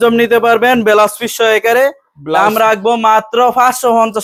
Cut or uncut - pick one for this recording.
uncut